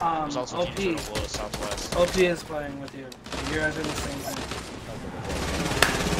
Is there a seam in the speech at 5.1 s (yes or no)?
yes